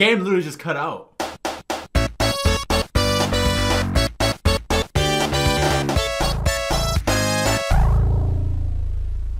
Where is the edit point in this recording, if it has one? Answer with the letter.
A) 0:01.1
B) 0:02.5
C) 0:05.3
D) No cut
A